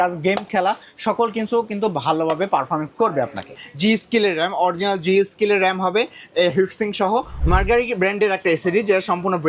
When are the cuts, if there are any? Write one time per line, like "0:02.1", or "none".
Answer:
0:03.6
0:07.3